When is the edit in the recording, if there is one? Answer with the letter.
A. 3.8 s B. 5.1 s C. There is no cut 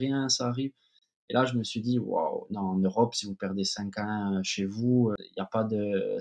B